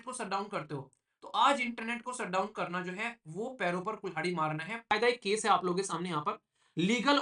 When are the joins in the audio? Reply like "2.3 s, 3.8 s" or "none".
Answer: 4.9 s